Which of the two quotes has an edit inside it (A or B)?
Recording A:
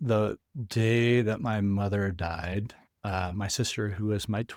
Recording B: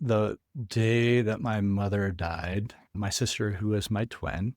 B